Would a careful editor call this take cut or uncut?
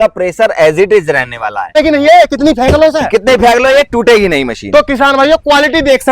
cut